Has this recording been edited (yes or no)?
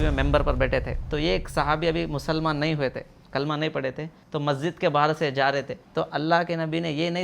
yes